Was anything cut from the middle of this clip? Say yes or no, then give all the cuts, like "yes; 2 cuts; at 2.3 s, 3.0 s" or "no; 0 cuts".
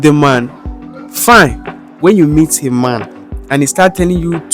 yes; 1 cut; at 1.9 s